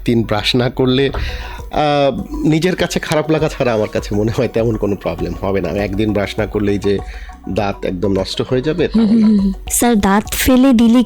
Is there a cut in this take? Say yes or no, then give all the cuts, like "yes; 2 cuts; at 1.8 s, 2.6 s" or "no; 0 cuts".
yes; 1 cut; at 9.6 s